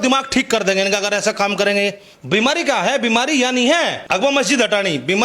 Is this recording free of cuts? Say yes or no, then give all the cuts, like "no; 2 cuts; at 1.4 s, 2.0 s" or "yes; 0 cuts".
no; 2 cuts; at 2.1 s, 4.0 s